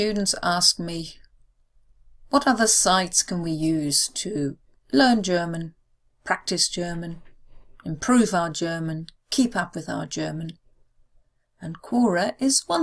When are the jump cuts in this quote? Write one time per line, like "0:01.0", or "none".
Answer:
none